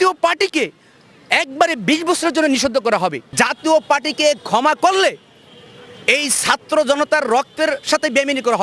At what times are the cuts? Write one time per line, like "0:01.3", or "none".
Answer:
0:03.2